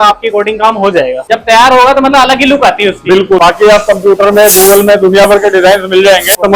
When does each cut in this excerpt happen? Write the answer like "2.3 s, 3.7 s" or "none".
1.3 s, 3.4 s